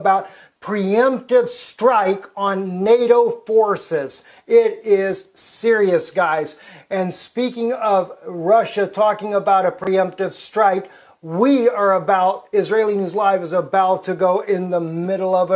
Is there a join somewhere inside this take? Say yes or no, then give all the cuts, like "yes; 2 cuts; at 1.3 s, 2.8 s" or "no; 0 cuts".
yes; 1 cut; at 8.7 s